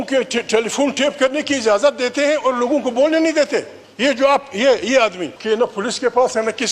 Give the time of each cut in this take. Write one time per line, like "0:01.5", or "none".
0:03.8
0:05.3

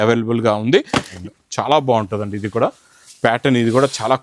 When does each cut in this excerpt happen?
0:01.2

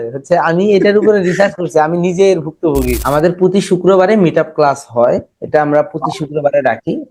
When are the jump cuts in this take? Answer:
0:03.0

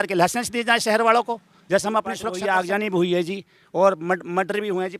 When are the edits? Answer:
0:02.3

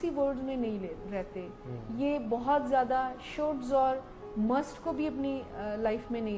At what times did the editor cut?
none

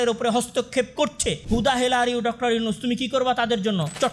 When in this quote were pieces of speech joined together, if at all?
0:01.3

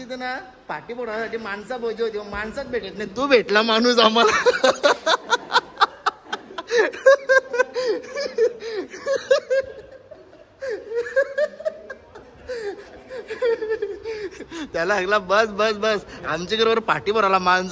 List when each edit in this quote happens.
none

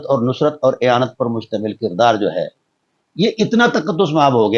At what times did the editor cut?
none

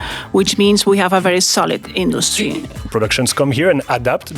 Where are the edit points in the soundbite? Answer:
0:02.5

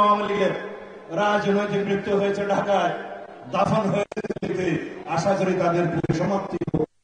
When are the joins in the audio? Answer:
none

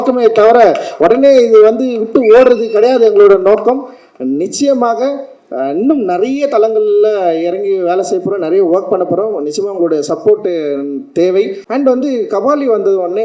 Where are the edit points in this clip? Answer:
0:11.6

